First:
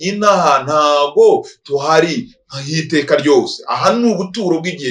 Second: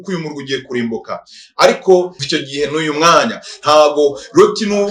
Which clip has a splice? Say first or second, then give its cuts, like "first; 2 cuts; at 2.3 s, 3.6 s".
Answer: second; 1 cut; at 2.2 s